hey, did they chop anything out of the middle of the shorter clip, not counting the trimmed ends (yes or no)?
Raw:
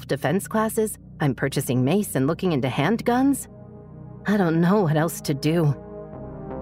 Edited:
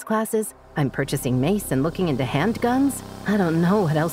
yes